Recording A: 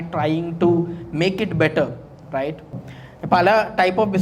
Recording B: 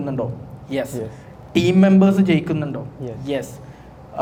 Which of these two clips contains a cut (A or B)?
A